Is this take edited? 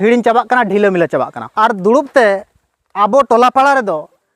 yes; 1 cut; at 1.4 s

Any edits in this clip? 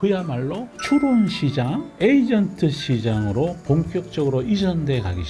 no; 0 cuts

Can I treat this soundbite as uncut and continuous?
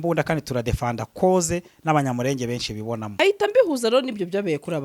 no; 1 cut; at 3.2 s

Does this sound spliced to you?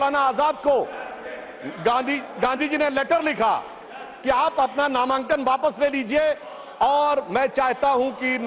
no; 0 cuts

